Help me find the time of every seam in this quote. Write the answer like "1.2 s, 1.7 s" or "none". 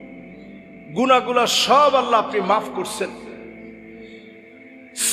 0.9 s